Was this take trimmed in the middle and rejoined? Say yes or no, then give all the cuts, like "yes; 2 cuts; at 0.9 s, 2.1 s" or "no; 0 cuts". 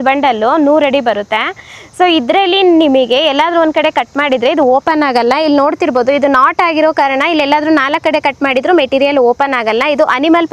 no; 0 cuts